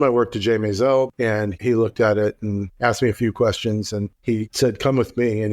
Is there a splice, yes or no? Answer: yes